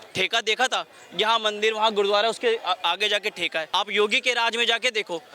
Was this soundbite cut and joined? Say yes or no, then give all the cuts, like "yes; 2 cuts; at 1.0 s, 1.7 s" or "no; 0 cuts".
yes; 1 cut; at 3.7 s